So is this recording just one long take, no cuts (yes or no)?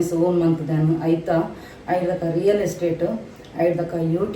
yes